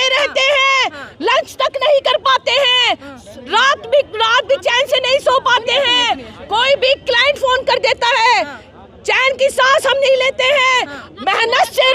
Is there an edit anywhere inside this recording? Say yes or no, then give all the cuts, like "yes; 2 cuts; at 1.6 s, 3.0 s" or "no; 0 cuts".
no; 0 cuts